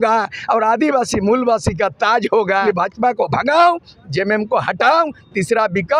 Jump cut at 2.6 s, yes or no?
yes